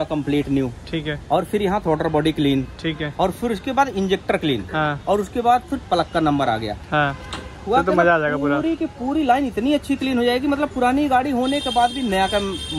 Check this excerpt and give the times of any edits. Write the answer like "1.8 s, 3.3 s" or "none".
none